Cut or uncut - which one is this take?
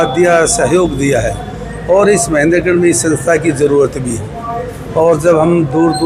uncut